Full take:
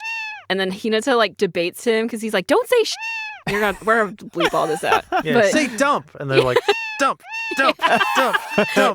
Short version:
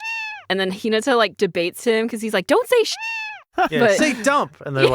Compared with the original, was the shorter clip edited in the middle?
yes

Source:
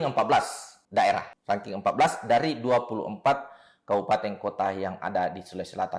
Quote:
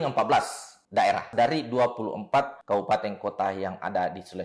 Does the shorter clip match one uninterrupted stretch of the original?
no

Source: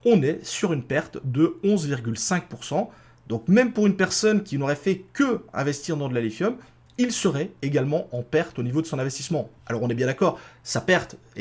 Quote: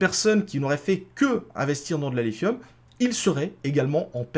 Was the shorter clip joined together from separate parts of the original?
no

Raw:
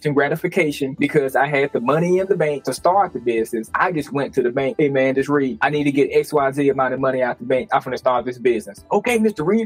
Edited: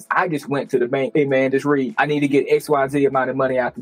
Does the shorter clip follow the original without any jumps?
yes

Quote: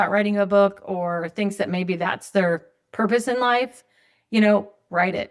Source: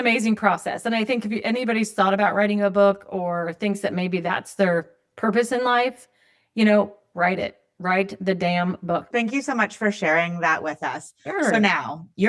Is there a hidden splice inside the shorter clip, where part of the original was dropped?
no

